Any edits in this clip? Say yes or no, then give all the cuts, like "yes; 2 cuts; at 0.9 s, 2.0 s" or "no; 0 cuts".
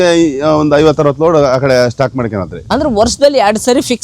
no; 0 cuts